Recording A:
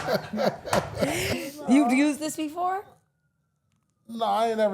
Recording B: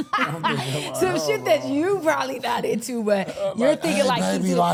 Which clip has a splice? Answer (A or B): A